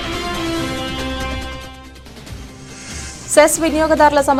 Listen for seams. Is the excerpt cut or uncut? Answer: uncut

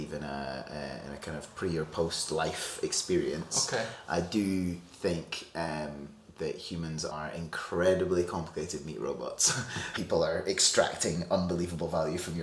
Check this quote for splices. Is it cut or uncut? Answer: cut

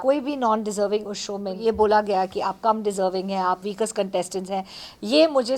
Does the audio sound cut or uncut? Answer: cut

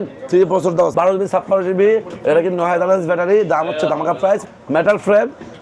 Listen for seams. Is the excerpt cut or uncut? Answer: cut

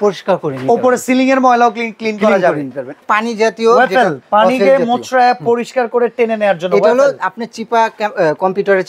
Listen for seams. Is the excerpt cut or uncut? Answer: cut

